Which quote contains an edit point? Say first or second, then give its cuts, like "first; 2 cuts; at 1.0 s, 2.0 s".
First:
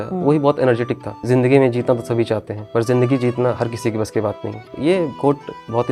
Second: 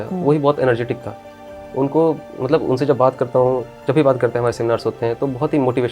first; 3 cuts; at 1.2 s, 2.5 s, 4.8 s